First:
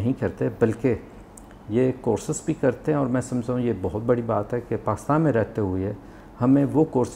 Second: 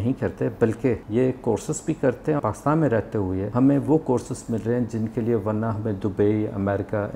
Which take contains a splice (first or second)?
second